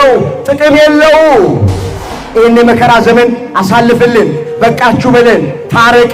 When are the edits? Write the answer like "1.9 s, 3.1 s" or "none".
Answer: 2.1 s